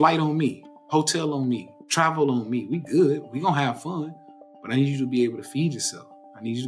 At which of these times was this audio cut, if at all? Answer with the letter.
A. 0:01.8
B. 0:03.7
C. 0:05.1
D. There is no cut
A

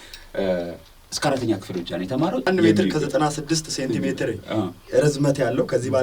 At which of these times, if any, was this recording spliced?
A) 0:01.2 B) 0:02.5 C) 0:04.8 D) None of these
B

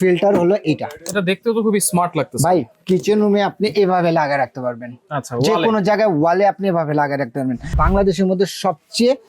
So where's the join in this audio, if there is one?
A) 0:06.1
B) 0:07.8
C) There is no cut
B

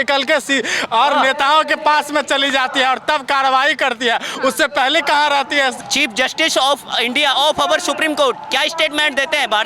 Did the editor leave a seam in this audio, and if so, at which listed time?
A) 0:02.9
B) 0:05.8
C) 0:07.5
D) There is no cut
B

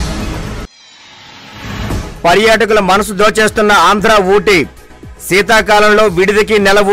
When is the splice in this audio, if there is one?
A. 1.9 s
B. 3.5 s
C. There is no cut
A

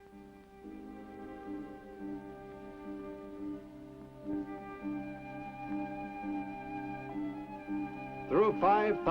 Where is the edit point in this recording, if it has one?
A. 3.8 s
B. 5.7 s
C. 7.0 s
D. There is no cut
C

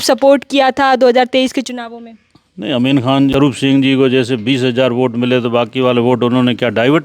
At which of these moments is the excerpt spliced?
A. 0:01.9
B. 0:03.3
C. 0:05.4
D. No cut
B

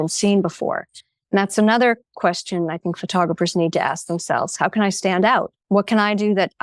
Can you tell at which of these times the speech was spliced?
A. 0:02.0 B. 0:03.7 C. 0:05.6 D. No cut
C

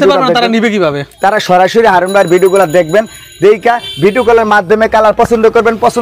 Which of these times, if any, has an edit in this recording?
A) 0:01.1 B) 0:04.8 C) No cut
A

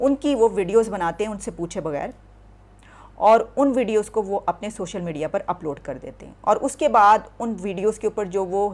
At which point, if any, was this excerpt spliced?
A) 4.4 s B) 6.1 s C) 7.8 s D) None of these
D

